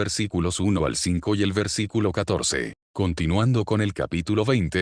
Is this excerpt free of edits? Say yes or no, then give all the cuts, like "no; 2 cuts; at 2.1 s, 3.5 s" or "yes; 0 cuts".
yes; 0 cuts